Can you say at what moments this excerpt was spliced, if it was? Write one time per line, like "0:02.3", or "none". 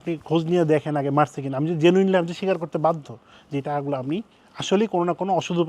none